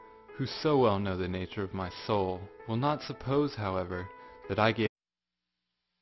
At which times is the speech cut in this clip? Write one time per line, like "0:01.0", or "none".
none